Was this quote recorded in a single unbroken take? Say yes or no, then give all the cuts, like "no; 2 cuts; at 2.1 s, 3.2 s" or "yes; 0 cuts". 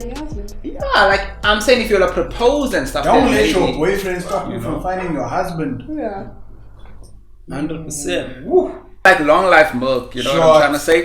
no; 1 cut; at 9.1 s